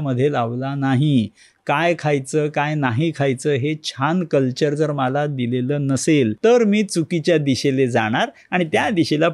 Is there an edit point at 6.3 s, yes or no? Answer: yes